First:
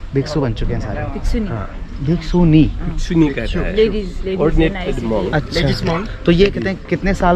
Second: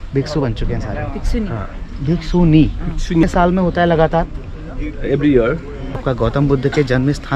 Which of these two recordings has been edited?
second; 2 cuts; at 3.2 s, 6.0 s

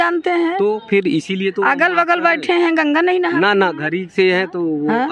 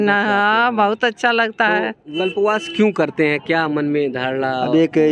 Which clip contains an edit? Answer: second; 1 cut; at 2.2 s

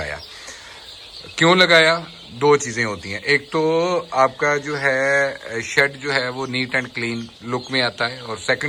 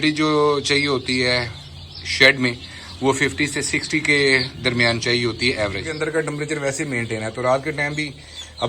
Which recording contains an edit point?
second; 1 cut; at 5.9 s

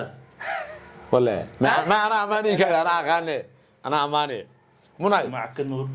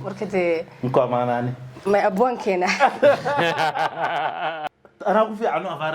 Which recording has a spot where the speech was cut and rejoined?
second; 1 cut; at 4.7 s

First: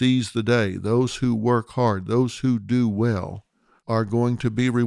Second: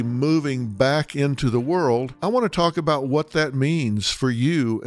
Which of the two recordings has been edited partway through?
second; 1 cut; at 2.1 s

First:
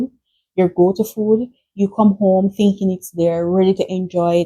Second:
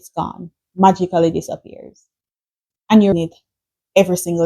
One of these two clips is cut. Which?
second; 1 cut; at 3.1 s

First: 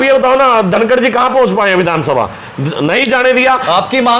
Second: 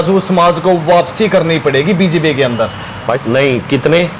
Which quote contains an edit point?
second; 1 cut; at 3.1 s

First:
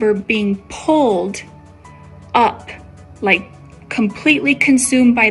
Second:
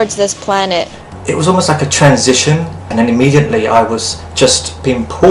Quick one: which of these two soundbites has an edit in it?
second; 1 cut; at 2.8 s

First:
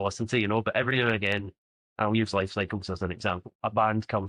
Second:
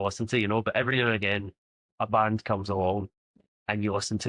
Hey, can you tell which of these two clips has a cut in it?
second; 1 cut; at 1.8 s

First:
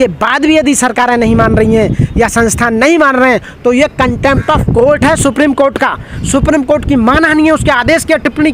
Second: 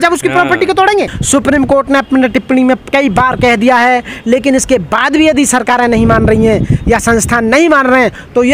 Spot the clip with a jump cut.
second; 1 cut; at 1.2 s

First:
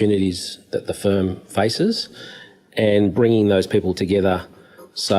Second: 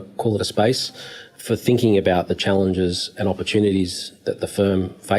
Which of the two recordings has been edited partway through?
second; 1 cut; at 1.4 s

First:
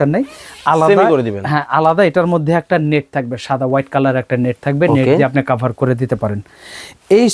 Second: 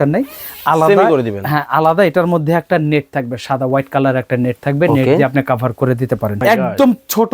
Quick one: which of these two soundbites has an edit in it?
second; 1 cut; at 6.4 s

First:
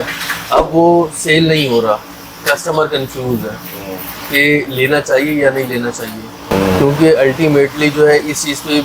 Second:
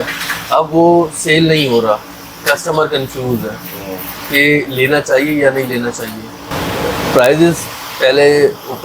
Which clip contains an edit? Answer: second; 1 cut; at 6.4 s

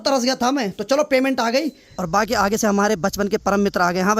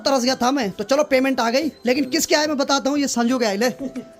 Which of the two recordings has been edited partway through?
first; 1 cut; at 1.8 s

